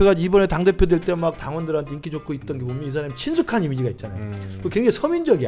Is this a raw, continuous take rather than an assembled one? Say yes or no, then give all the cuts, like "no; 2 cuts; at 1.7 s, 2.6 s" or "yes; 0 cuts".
no; 1 cut; at 1.4 s